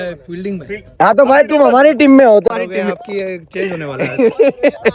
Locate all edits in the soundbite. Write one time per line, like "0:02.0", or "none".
0:02.5